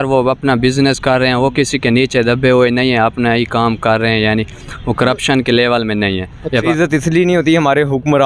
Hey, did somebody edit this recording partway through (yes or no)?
yes